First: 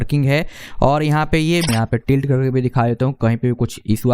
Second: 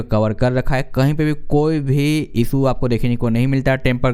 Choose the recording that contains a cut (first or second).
first